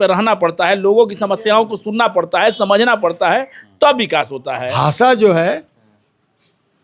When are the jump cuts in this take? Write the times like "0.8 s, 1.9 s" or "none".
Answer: 4.7 s